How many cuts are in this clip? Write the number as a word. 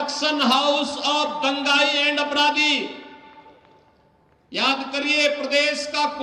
zero